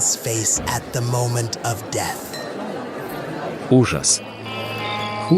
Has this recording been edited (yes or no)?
yes